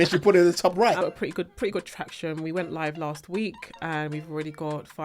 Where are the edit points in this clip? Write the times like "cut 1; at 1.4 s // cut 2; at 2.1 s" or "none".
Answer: cut 1; at 1.0 s